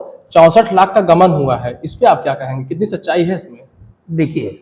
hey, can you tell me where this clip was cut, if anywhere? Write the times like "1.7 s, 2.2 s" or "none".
none